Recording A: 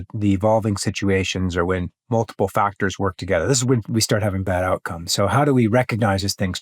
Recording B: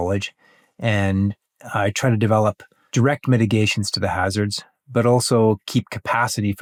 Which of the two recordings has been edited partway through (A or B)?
A